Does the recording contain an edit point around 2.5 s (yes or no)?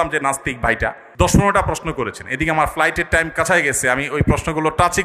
no